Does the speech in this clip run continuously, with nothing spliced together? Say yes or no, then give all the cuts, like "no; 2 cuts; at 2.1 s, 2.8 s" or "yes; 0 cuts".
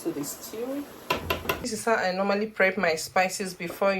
no; 1 cut; at 1.6 s